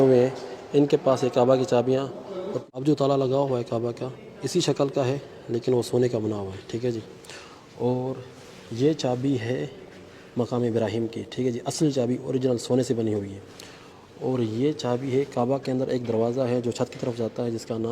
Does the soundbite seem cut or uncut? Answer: cut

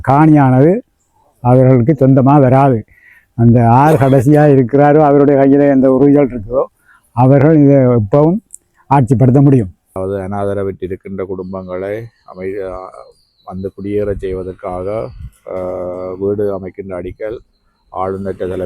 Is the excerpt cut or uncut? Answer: cut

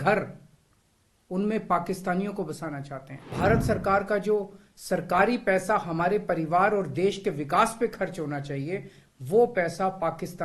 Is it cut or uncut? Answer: cut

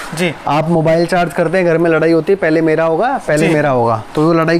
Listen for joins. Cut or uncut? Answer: uncut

